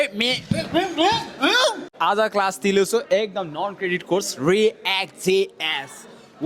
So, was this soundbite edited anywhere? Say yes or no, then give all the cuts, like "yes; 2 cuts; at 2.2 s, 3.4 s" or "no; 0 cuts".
yes; 1 cut; at 1.9 s